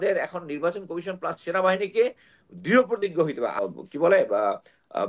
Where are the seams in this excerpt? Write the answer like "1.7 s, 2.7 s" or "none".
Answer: 3.6 s

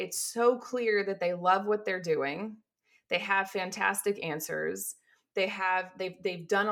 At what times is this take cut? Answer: none

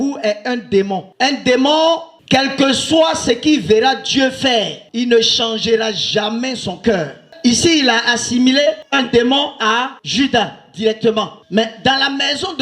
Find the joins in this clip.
1.0 s

